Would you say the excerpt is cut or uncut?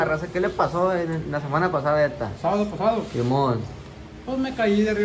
uncut